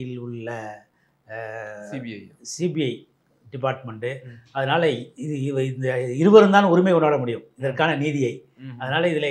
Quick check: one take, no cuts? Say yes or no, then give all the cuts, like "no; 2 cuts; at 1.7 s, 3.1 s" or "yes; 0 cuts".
yes; 0 cuts